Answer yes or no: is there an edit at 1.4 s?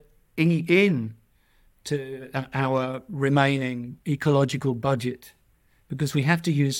no